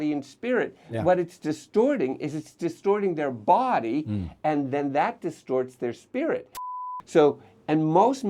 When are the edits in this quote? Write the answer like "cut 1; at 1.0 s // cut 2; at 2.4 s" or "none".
cut 1; at 6.8 s

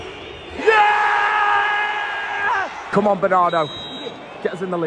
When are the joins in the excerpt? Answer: cut 1; at 2.8 s

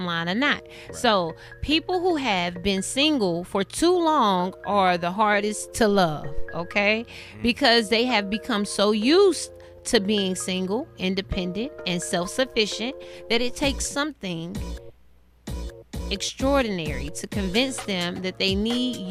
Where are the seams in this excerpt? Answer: none

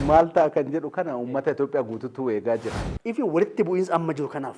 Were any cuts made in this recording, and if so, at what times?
cut 1; at 2.8 s

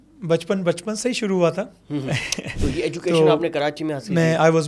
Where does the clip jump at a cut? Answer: none

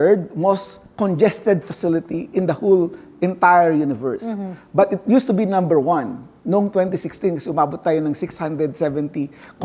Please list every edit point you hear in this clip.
none

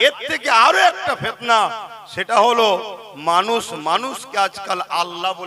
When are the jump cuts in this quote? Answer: none

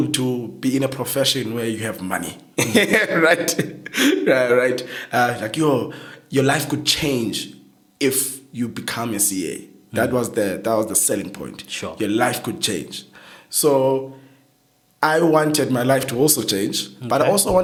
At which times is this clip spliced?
none

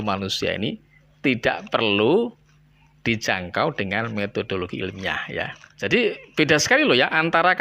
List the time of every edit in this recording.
cut 1; at 5.6 s

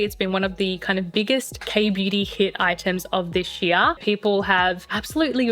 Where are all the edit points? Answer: cut 1; at 4.0 s

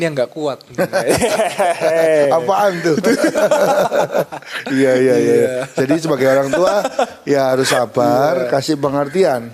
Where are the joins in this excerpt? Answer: none

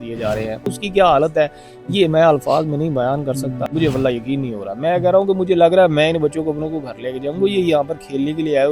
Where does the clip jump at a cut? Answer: cut 1; at 0.8 s // cut 2; at 3.6 s

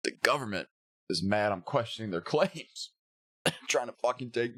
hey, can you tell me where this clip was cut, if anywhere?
none

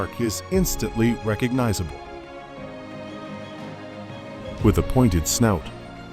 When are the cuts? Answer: cut 1; at 1.9 s // cut 2; at 4.6 s

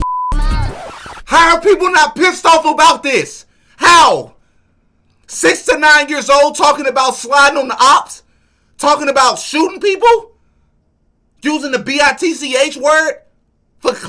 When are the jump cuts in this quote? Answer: none

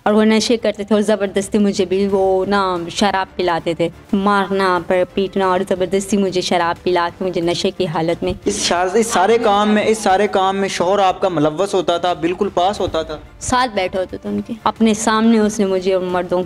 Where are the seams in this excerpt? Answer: cut 1; at 4.0 s // cut 2; at 14.5 s

